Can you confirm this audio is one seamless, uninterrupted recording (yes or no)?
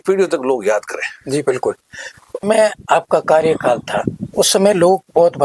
no